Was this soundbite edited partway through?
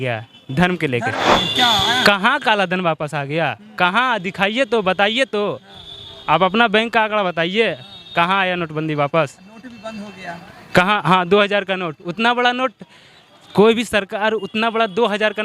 yes; 1 cut; at 1.3 s

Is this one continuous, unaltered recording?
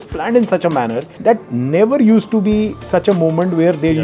no; 1 cut; at 1.1 s

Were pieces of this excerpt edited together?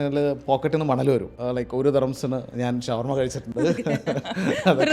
yes; 1 cut; at 1.3 s

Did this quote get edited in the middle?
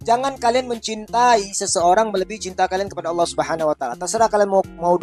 no; 0 cuts

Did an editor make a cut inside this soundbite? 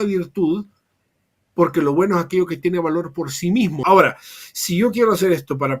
yes; 1 cut; at 3.8 s

